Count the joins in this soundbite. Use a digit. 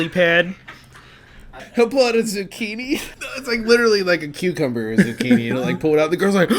1